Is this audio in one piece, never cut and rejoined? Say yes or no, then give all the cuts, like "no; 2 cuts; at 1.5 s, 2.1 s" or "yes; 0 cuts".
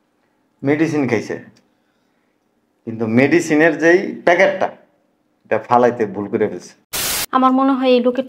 no; 1 cut; at 7.1 s